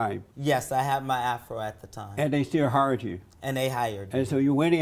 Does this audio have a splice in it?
no; 0 cuts

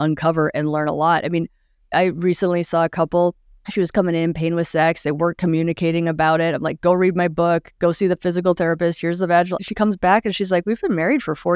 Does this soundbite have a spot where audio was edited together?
no; 0 cuts

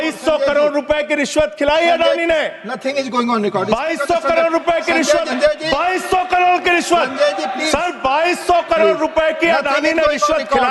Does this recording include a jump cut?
yes; 2 cuts; at 5.3 s, 7.5 s

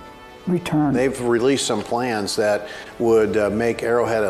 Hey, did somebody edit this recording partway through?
yes; 1 cut; at 1.0 s

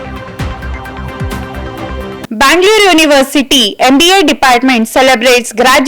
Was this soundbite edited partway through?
yes; 1 cut; at 2.2 s

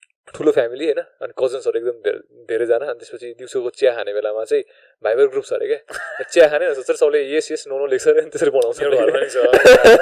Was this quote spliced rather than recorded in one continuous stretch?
no; 0 cuts

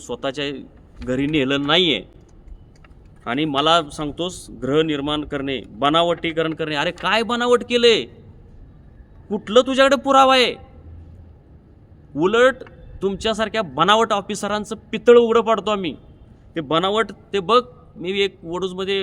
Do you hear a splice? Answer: no; 0 cuts

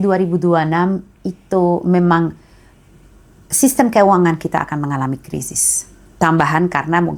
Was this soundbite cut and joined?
no; 0 cuts

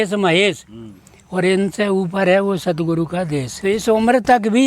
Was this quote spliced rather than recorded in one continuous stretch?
yes; 1 cut; at 3.5 s

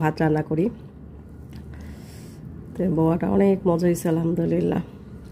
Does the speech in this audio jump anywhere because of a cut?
no; 0 cuts

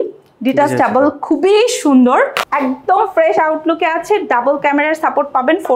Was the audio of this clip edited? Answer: yes; 1 cut; at 2.4 s

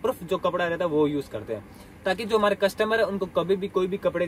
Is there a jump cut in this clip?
no; 0 cuts

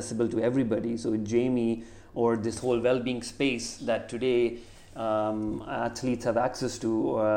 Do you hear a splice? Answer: no; 0 cuts

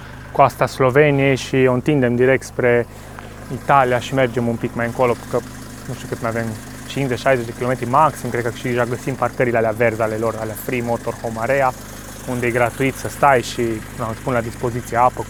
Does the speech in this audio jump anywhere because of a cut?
no; 0 cuts

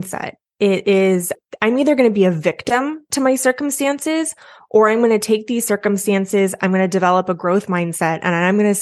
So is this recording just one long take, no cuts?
no; 1 cut; at 1.4 s

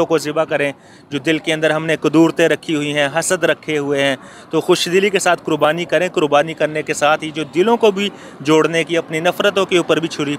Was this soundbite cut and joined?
no; 0 cuts

